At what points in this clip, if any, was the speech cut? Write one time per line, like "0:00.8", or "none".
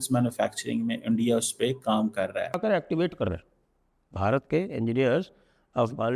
0:02.5